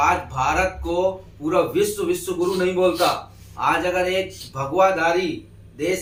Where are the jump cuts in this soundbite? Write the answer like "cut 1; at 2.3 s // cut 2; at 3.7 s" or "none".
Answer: none